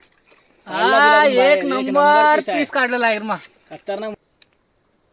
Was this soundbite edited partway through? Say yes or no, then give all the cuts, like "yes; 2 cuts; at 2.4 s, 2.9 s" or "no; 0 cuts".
yes; 1 cut; at 4.1 s